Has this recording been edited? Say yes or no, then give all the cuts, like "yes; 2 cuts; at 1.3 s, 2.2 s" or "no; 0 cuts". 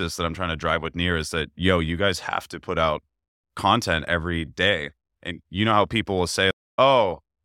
no; 0 cuts